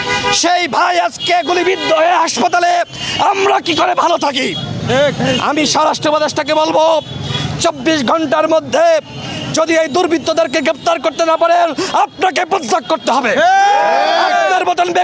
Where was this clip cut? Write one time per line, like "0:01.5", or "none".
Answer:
none